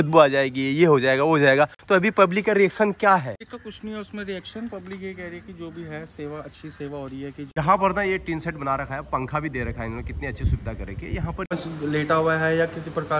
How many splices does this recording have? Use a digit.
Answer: 3